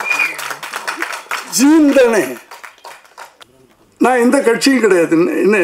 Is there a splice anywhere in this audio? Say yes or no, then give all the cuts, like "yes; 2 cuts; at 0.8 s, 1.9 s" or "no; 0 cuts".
yes; 1 cut; at 3.4 s